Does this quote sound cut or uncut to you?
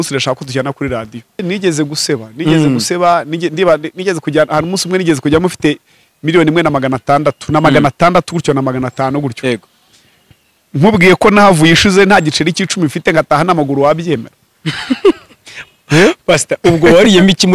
cut